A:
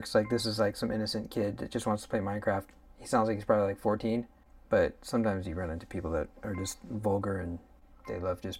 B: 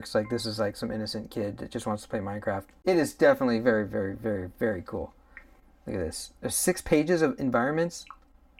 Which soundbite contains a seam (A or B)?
B